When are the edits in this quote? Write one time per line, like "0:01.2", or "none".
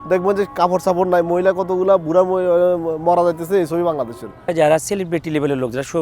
0:04.5